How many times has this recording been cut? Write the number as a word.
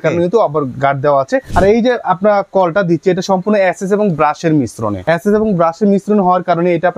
two